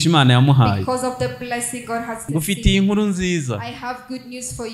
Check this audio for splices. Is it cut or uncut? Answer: cut